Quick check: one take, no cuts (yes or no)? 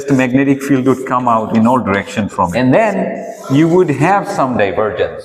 no